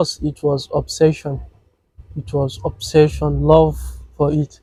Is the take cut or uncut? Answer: uncut